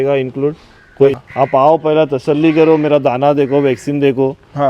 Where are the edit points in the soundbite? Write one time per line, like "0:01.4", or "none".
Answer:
0:01.2